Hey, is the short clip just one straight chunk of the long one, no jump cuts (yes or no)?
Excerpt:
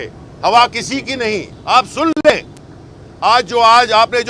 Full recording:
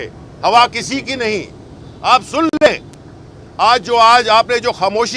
no